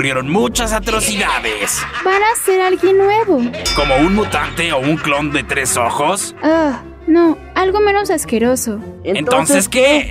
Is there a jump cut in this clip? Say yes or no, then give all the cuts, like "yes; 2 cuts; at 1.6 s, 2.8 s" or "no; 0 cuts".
no; 0 cuts